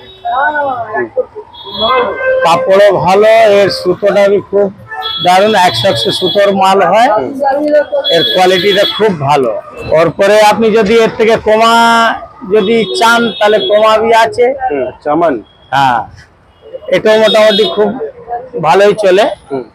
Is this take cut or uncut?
cut